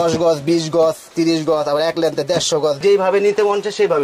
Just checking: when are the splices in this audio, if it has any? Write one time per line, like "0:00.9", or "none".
0:02.8